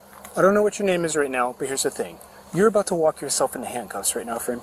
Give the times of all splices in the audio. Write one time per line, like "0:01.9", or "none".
none